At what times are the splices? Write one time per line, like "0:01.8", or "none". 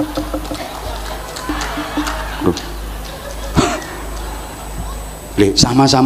0:01.5